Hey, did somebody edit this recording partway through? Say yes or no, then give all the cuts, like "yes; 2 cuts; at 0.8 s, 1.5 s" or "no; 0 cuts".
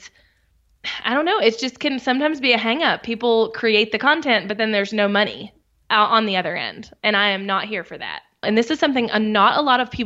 yes; 1 cut; at 8.4 s